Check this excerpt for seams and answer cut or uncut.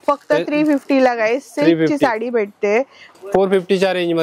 cut